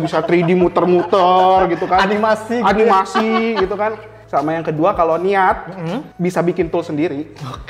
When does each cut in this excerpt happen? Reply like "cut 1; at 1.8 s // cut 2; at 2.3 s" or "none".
cut 1; at 4.2 s // cut 2; at 6.0 s